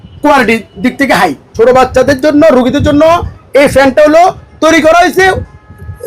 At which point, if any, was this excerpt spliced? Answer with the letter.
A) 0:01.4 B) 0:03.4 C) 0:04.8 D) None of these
A